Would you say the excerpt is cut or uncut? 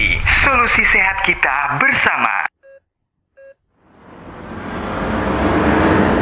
cut